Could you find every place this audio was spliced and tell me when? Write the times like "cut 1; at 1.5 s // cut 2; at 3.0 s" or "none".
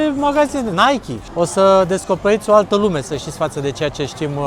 cut 1; at 1.2 s